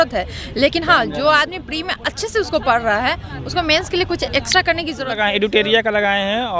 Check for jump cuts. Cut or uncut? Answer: cut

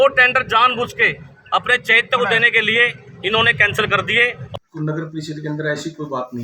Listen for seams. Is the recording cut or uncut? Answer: cut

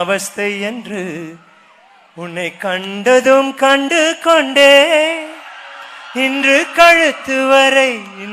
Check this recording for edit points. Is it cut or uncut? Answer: uncut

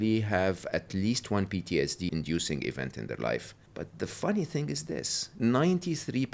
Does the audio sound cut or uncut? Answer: cut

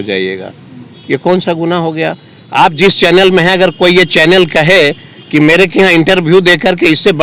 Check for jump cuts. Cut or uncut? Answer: uncut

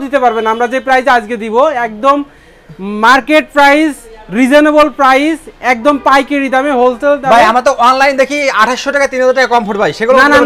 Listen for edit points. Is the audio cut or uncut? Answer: uncut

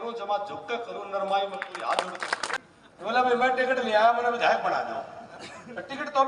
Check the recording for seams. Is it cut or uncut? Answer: cut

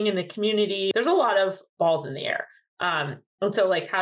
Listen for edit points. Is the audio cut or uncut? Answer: cut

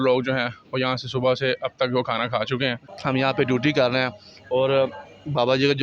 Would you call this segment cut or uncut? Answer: cut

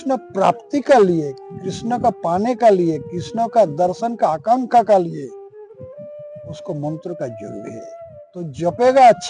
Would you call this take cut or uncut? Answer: uncut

